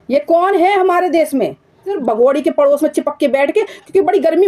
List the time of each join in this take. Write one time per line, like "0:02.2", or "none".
0:01.9